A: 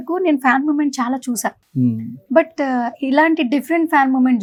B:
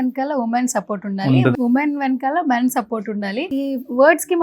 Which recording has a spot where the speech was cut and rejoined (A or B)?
B